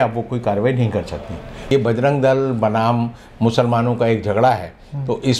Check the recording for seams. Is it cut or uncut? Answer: cut